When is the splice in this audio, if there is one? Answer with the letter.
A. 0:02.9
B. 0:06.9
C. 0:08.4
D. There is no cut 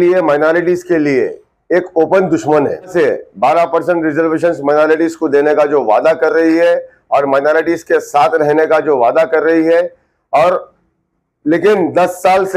A